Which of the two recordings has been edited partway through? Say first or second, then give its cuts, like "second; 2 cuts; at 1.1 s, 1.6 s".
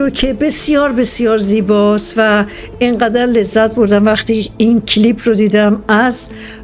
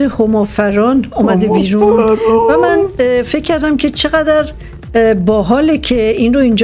first; 1 cut; at 4.6 s